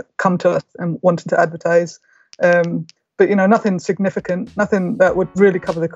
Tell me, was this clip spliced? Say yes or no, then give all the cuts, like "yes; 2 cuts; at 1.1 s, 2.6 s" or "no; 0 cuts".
no; 0 cuts